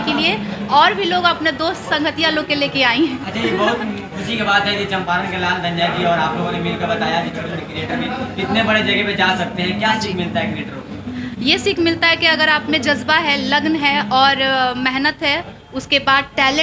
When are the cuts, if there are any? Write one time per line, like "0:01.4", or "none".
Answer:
none